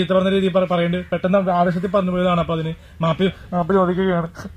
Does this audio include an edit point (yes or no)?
no